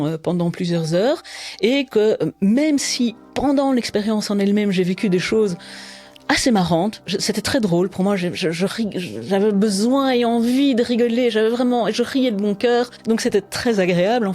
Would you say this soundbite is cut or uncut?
cut